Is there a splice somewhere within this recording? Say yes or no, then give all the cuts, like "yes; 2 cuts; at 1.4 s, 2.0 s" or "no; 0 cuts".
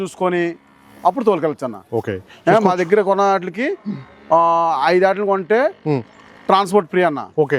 no; 0 cuts